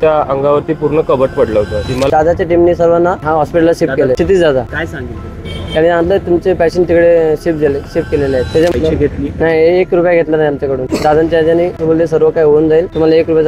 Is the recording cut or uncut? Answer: cut